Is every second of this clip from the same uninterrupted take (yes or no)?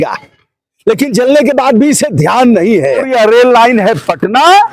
no